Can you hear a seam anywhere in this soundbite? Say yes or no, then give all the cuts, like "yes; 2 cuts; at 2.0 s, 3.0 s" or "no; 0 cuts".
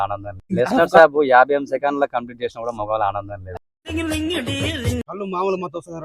yes; 1 cut; at 5.1 s